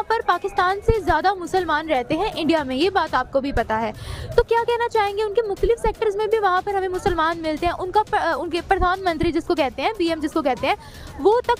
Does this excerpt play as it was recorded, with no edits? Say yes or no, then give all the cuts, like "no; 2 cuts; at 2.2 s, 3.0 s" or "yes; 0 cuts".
yes; 0 cuts